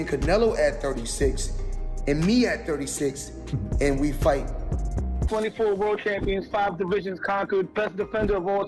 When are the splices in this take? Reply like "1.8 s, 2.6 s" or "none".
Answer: 5.2 s